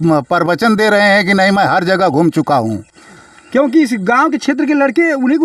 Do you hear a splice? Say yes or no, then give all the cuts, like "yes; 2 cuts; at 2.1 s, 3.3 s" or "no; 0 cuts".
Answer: no; 0 cuts